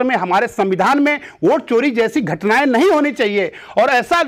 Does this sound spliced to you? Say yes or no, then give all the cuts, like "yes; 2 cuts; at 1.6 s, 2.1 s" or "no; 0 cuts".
no; 0 cuts